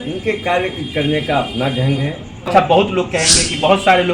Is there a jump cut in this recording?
yes; 1 cut; at 2.5 s

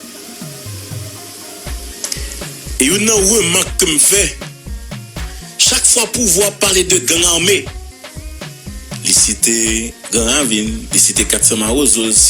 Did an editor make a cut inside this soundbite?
yes; 4 cuts; at 4.4 s, 5.7 s, 7.7 s, 9.0 s

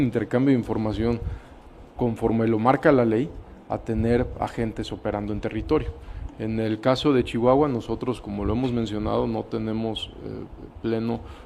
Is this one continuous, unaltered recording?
yes; 0 cuts

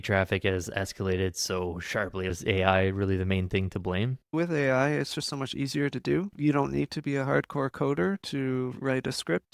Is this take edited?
yes; 3 cuts; at 2.3 s, 4.3 s, 6.3 s

